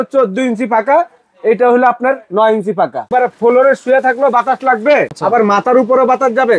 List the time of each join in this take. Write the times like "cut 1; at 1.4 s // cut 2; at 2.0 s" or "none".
cut 1; at 3.1 s // cut 2; at 5.1 s